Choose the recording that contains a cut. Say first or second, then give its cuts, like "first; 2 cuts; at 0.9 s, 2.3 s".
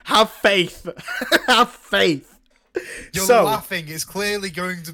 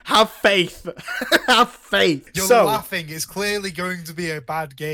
second; 1 cut; at 2.3 s